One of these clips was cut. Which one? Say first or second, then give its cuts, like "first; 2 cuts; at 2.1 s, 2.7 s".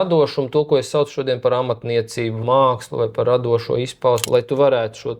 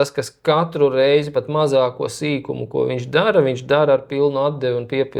first; 2 cuts; at 2.4 s, 4.2 s